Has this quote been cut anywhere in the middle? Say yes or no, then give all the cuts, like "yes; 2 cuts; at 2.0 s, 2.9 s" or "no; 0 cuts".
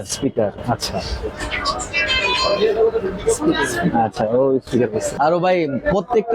yes; 2 cuts; at 1.3 s, 5.1 s